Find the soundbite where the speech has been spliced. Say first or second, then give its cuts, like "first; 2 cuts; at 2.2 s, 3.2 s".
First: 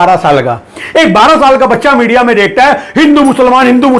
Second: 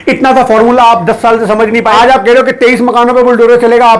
second; 1 cut; at 1.8 s